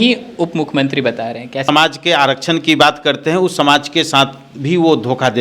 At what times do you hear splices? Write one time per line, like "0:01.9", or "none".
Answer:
0:01.7